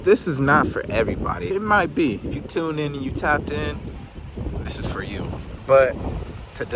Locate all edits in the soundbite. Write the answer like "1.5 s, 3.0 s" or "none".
1.5 s, 2.3 s, 3.9 s, 5.4 s